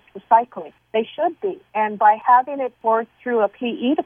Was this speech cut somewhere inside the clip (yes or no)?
yes